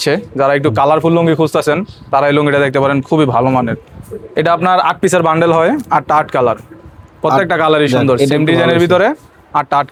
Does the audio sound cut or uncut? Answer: uncut